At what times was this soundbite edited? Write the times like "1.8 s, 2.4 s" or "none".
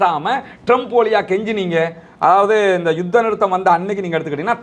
none

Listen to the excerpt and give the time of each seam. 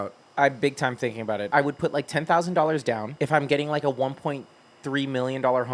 1.5 s, 3.1 s

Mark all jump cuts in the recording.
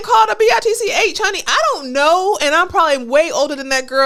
none

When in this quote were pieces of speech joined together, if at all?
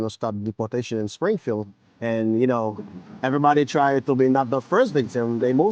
none

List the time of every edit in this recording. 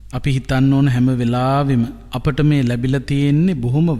2.0 s

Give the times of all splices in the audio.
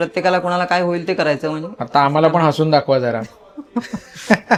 none

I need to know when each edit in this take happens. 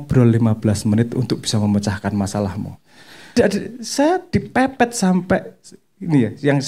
3.4 s

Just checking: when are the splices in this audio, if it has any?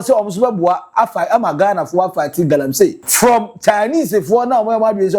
3.0 s

